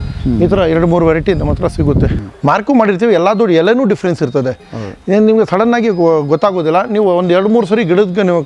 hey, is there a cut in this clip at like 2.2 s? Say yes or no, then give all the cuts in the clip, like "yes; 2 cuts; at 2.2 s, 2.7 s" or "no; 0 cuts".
yes; 1 cut; at 2.2 s